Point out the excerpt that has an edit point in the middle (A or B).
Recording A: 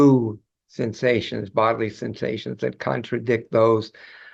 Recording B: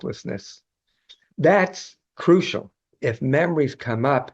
B